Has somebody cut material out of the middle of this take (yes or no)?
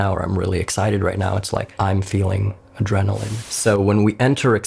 yes